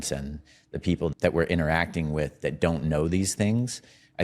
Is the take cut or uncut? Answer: cut